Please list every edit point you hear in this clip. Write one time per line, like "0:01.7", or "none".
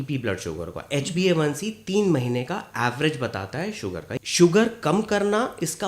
0:04.1